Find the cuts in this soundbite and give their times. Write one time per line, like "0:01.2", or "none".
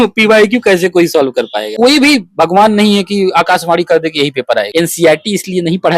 0:01.7
0:04.7